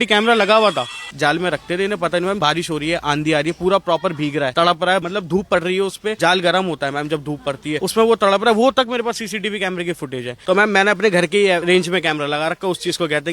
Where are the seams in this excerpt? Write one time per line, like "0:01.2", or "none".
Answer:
0:01.0
0:02.4
0:04.8
0:06.2
0:07.8
0:10.3
0:11.6